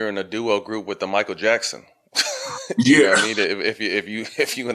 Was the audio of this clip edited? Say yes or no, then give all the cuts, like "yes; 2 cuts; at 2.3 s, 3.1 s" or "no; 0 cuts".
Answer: no; 0 cuts